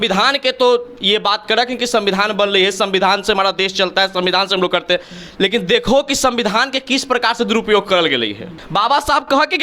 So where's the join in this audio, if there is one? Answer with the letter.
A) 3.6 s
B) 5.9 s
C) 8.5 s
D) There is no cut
C